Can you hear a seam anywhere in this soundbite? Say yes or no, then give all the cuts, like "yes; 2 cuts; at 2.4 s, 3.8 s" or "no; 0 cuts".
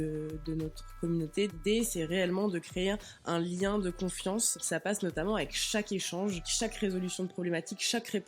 yes; 3 cuts; at 1.5 s, 4.6 s, 6.5 s